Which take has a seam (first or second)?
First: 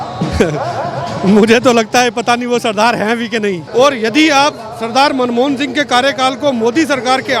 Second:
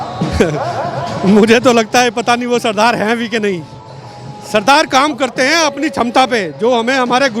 first